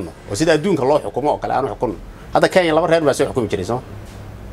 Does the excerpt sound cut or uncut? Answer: uncut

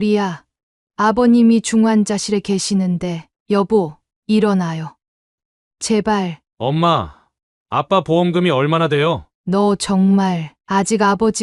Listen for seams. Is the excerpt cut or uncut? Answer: cut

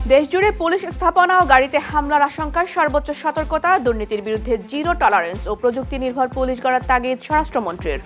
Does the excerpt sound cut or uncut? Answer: uncut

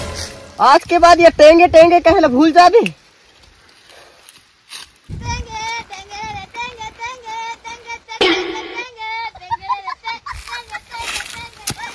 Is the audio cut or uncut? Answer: uncut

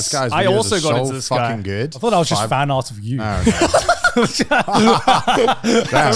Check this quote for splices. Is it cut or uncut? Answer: cut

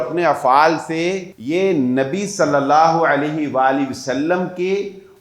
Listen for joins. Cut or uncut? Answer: cut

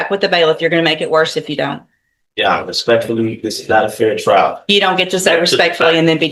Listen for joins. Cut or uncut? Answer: uncut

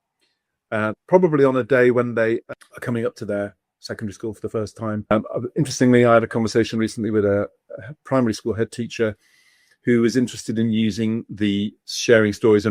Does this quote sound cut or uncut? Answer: cut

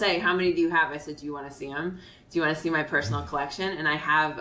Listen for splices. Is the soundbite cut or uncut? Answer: uncut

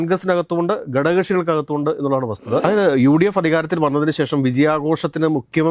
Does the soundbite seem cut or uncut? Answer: cut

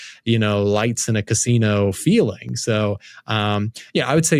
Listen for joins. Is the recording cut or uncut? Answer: uncut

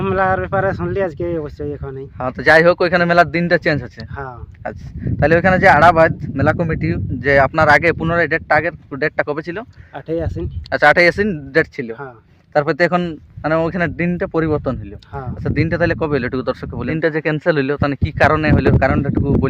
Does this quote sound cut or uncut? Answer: cut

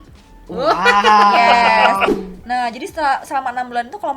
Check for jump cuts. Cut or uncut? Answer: cut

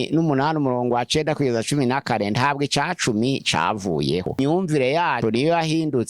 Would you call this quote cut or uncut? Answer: cut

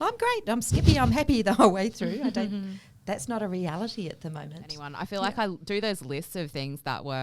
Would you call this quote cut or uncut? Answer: cut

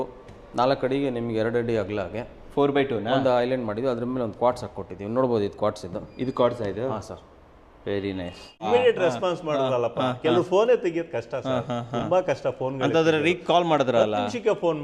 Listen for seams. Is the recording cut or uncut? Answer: cut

